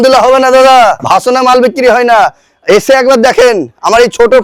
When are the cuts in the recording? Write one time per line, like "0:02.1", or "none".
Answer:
0:01.0